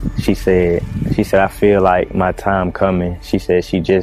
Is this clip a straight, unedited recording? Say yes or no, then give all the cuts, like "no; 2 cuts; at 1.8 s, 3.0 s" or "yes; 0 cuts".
yes; 0 cuts